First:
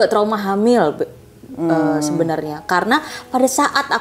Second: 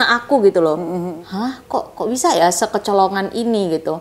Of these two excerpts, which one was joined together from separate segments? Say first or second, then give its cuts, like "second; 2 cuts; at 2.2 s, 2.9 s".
second; 1 cut; at 1.2 s